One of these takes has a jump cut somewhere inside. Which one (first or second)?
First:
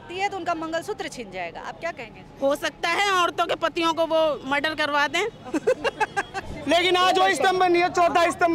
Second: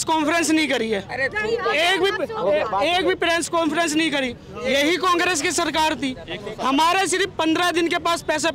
first